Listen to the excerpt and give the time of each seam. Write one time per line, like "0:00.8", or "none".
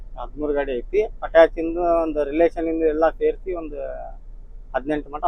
none